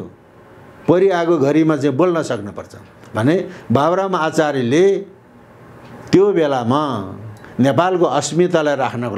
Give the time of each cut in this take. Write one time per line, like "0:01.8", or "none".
none

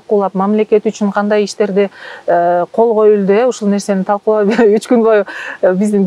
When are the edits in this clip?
none

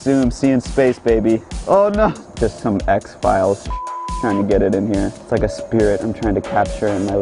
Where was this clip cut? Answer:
0:01.5
0:02.2
0:05.2

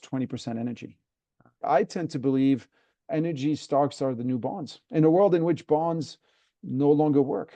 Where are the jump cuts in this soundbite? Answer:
0:01.6

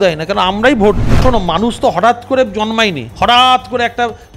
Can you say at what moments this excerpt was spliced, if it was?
0:01.2
0:03.0

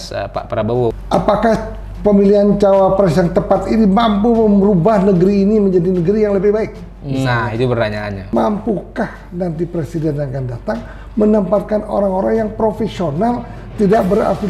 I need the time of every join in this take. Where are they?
0:01.0
0:08.3

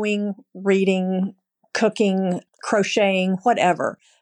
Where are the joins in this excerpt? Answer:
0:02.4

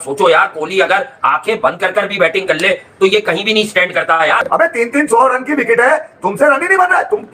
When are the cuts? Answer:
0:04.4

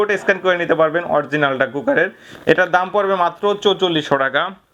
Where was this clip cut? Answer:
none

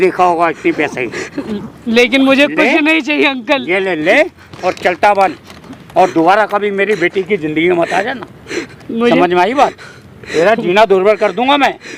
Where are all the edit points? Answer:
none

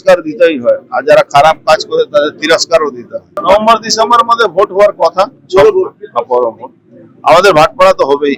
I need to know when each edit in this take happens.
none

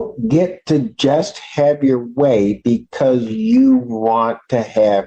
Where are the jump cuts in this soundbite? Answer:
none

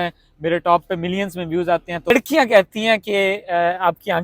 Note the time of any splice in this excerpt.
0:02.1

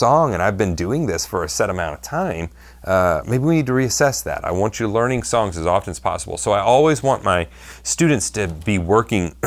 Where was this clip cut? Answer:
none

